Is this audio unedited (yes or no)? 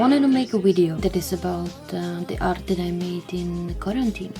no